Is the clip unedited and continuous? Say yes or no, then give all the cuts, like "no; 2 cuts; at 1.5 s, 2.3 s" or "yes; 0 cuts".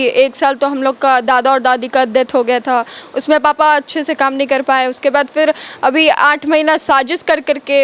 yes; 0 cuts